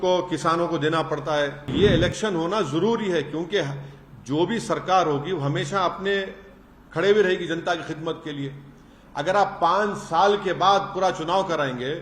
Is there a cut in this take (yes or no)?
yes